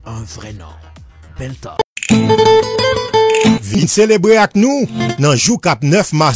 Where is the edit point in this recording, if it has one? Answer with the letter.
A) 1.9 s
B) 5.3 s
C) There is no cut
A